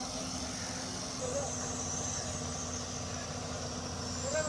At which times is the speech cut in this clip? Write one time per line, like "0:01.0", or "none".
0:01.2